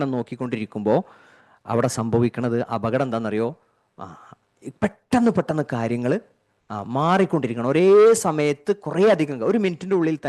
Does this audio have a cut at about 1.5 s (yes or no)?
no